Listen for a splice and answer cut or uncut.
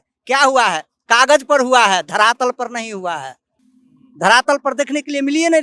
uncut